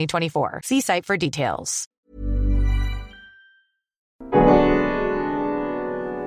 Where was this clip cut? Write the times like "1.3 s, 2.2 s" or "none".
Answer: 1.8 s, 4.1 s